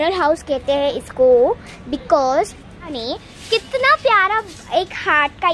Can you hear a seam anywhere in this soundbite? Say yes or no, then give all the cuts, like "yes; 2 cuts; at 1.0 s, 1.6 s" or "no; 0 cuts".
yes; 1 cut; at 3.0 s